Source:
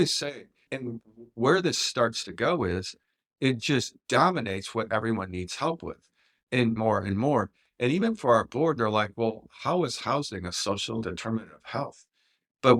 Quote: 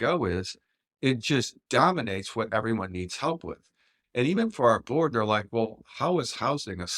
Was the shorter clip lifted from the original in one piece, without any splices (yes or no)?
no